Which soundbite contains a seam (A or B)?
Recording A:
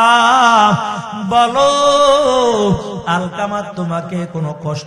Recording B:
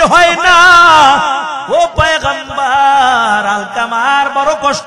B